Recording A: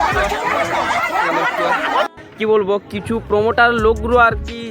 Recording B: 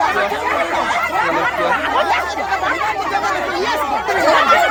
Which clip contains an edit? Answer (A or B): A